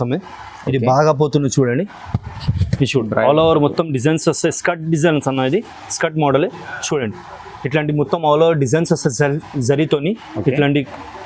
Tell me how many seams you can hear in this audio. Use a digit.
0